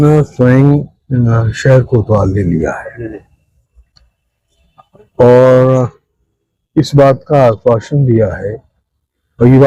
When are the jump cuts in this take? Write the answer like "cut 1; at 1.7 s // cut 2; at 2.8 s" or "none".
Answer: none

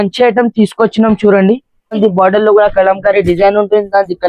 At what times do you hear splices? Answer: cut 1; at 2.0 s

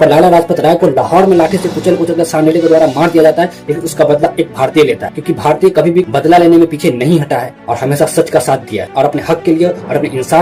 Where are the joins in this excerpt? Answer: none

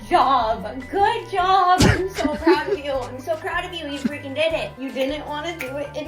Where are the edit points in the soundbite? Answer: cut 1; at 4.7 s

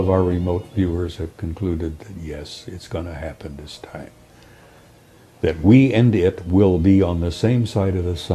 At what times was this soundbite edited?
none

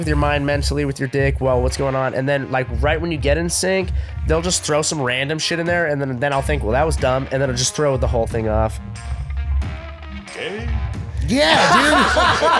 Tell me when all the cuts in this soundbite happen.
none

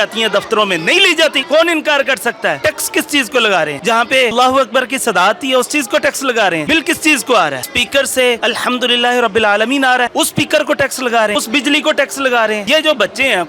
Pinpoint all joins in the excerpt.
cut 1; at 1.4 s // cut 2; at 2.6 s // cut 3; at 4.3 s // cut 4; at 6.6 s // cut 5; at 7.7 s // cut 6; at 8.4 s // cut 7; at 10.1 s // cut 8; at 11.3 s // cut 9; at 12.6 s

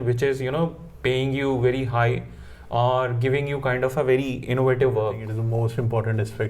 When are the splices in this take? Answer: cut 1; at 5.3 s

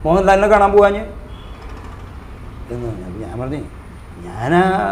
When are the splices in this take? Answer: none

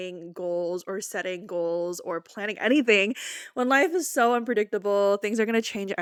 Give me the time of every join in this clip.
none

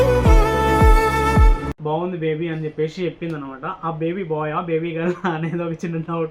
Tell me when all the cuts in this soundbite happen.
cut 1; at 1.7 s

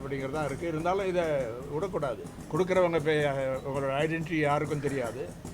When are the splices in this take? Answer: cut 1; at 2.4 s

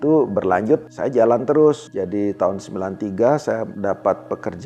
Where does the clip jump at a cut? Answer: cut 1; at 0.9 s // cut 2; at 1.9 s // cut 3; at 3.7 s

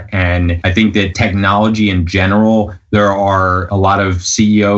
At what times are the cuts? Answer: cut 1; at 0.9 s // cut 2; at 3.6 s

